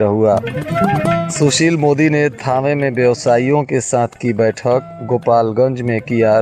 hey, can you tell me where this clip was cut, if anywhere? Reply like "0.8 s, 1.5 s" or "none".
none